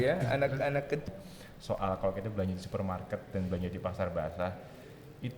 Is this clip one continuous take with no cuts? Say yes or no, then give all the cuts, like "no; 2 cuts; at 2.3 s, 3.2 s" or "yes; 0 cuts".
no; 1 cut; at 1.1 s